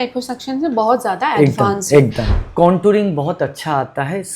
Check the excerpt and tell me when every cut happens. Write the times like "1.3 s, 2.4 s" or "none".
2.3 s